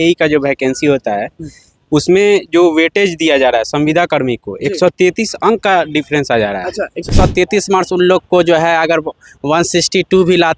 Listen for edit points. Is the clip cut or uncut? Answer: cut